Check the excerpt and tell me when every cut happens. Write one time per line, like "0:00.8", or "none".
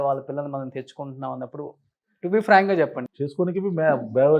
0:03.0